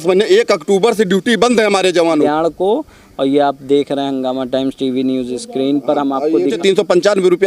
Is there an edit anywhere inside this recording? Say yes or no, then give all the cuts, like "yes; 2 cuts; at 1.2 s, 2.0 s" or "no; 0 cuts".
yes; 2 cuts; at 2.3 s, 6.6 s